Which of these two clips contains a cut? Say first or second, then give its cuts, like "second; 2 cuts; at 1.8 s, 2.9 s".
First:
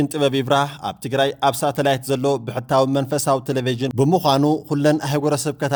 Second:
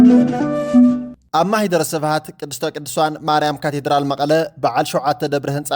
second; 1 cut; at 1.0 s